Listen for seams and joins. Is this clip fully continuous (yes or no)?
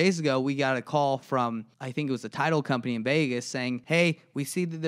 no